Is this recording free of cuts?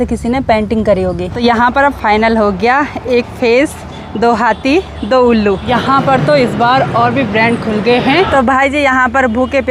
no; 3 cuts; at 1.3 s, 5.7 s, 8.4 s

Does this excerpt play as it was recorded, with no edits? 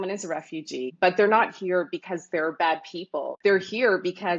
no; 2 cuts; at 0.9 s, 3.3 s

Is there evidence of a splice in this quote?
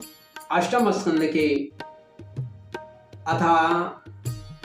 yes; 2 cuts; at 1.7 s, 3.1 s

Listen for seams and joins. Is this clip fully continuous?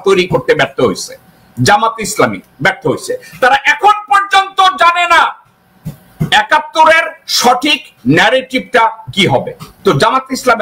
no; 1 cut; at 9.6 s

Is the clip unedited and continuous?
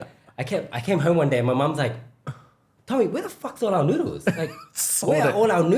yes; 0 cuts

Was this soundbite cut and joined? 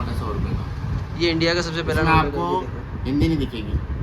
no; 0 cuts

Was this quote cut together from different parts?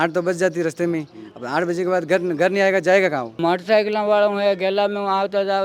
yes; 1 cut; at 3.4 s

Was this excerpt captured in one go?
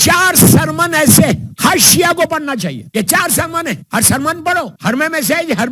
no; 4 cuts; at 1.5 s, 2.8 s, 3.8 s, 4.7 s

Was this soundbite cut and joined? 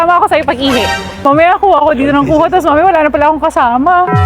yes; 1 cut; at 1.2 s

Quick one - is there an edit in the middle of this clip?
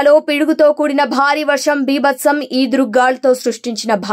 no; 0 cuts

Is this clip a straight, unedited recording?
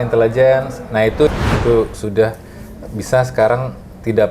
no; 1 cut; at 1.3 s

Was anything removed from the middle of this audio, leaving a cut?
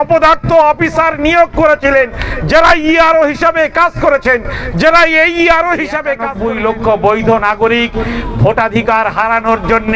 yes; 1 cut; at 6.2 s

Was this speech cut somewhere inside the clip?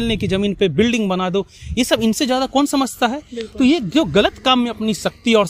no; 0 cuts

